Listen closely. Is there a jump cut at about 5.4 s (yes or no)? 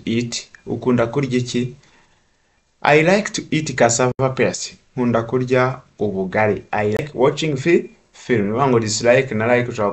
no